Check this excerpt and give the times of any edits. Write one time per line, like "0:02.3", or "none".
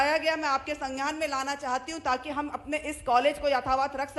none

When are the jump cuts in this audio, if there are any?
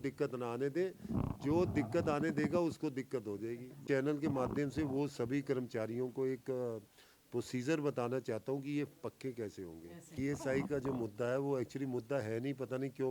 0:03.7
0:10.2

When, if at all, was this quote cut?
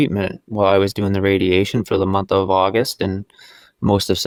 none

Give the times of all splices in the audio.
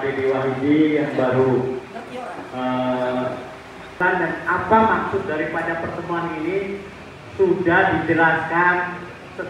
0:04.0

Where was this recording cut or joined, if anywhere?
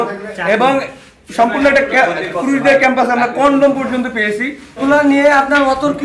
0:04.7

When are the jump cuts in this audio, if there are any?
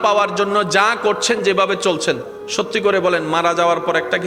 none

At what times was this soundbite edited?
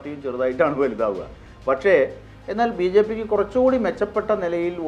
0:02.3

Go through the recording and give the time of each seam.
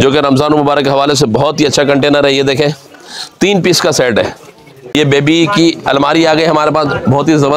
0:04.9

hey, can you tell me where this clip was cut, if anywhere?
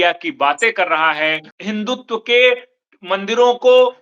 0:01.5

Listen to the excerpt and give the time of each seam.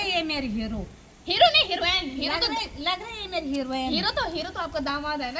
none

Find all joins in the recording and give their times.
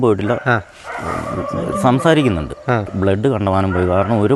0:02.9

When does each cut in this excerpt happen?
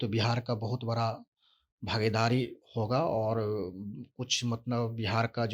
none

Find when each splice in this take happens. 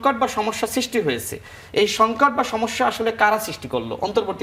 none

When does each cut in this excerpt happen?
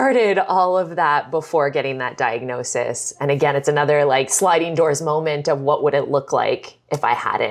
none

